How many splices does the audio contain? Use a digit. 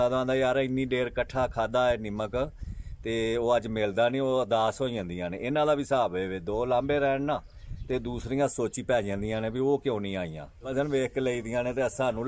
1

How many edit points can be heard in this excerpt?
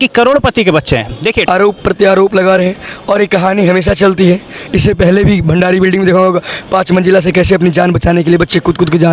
1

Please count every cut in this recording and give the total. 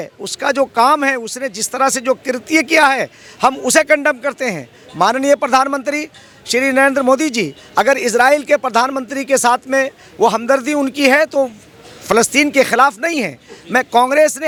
0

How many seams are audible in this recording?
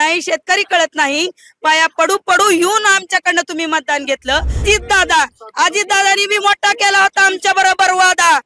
1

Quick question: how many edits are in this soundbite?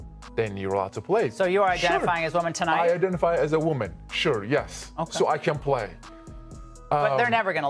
0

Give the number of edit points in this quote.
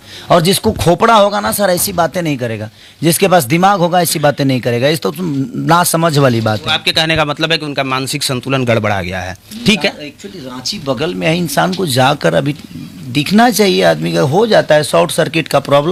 0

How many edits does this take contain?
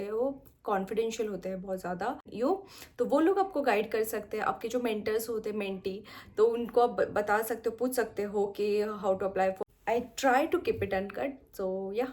2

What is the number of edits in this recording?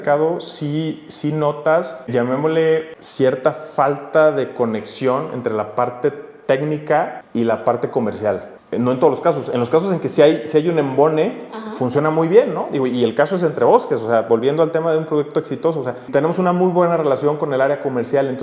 5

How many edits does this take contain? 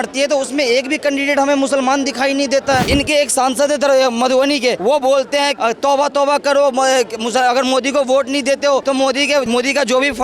4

